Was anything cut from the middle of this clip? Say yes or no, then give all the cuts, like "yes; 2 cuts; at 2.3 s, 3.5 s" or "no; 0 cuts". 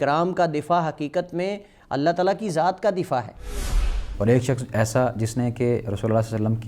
yes; 1 cut; at 3.9 s